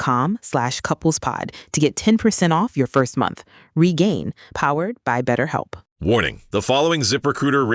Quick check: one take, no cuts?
no; 1 cut; at 5.8 s

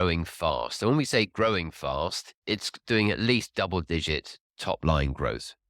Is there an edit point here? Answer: yes; 1 cut; at 2.4 s

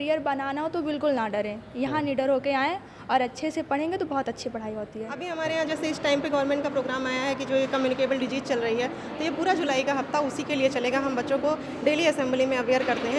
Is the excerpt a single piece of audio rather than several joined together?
no; 1 cut; at 5.3 s

